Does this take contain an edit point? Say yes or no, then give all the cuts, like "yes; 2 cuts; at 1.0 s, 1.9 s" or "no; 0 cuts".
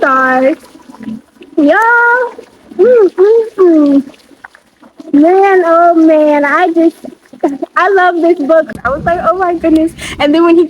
yes; 1 cut; at 8.7 s